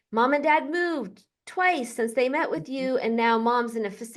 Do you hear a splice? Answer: no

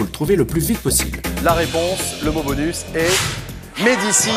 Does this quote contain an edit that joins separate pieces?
yes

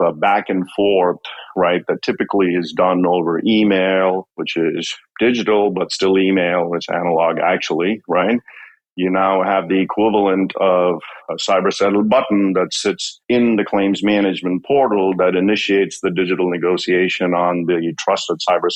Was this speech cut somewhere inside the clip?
no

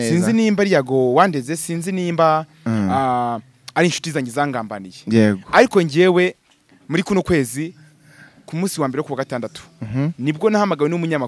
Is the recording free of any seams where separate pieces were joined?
yes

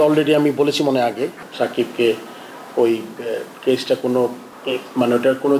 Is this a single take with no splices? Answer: no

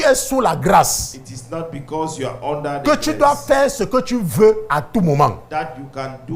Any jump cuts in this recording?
no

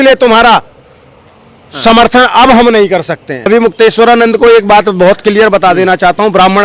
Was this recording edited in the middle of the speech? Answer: yes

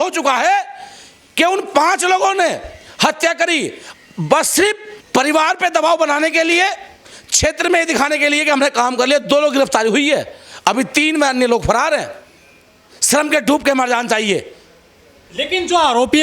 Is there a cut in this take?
no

